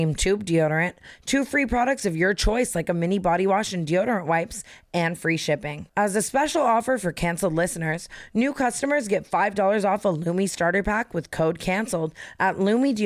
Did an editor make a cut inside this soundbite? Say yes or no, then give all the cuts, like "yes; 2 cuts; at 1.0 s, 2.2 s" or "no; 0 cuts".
no; 0 cuts